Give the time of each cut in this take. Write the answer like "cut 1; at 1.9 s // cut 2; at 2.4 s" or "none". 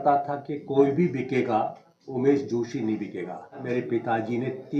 cut 1; at 3.6 s